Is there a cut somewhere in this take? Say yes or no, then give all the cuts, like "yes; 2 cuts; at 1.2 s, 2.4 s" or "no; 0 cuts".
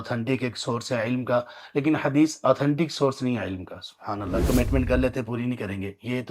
yes; 1 cut; at 4.4 s